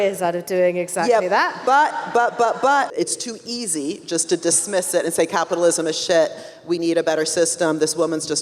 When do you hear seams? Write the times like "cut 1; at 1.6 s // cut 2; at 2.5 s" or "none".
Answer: cut 1; at 3.0 s